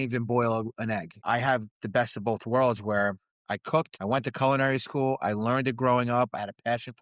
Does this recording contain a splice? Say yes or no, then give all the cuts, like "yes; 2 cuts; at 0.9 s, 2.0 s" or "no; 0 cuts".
yes; 2 cuts; at 1.2 s, 3.9 s